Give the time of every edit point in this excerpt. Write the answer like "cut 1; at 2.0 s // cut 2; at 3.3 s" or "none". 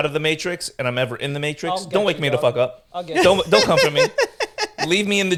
none